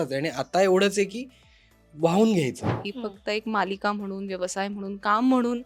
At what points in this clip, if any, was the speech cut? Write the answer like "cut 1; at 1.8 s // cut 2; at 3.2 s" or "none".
cut 1; at 2.8 s